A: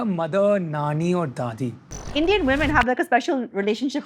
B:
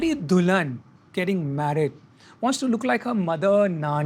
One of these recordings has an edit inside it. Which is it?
A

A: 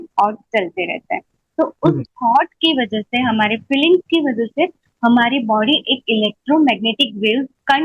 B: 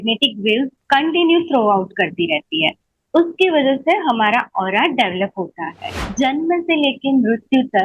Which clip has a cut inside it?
B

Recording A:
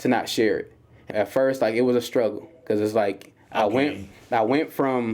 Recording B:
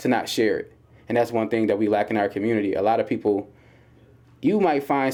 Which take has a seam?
A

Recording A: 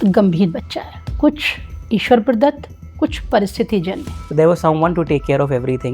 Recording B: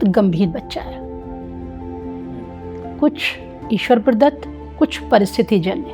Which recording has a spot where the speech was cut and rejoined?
A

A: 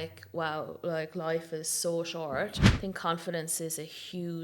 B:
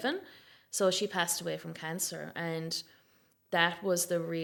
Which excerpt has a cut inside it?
A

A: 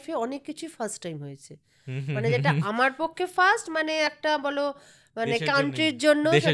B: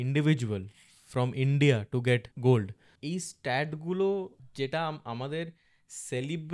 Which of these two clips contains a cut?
B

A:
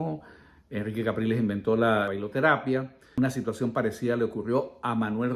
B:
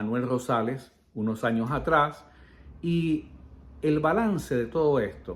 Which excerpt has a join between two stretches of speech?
A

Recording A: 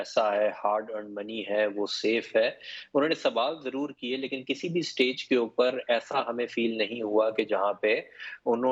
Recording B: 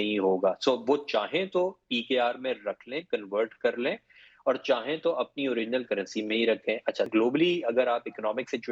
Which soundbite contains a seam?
B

